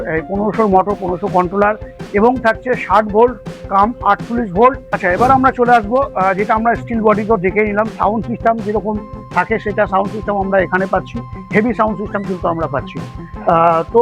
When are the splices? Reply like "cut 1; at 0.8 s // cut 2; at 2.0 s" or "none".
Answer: cut 1; at 4.9 s

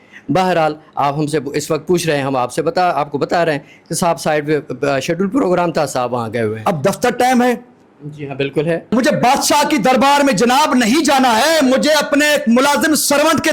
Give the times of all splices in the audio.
cut 1; at 6.6 s // cut 2; at 8.9 s

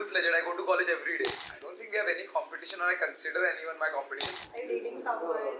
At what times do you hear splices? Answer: cut 1; at 1.4 s // cut 2; at 4.3 s

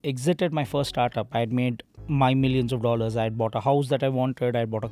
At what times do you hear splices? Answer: none

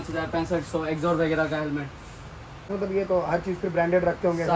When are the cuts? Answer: cut 1; at 2.7 s

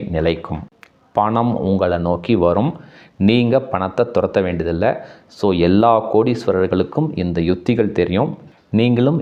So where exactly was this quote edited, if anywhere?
none

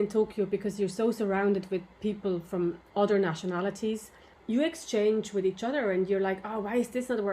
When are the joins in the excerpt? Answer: cut 1; at 2.8 s // cut 2; at 4.3 s

